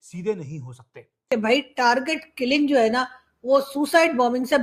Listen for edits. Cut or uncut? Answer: cut